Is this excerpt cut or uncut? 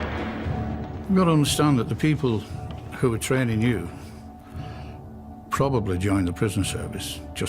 cut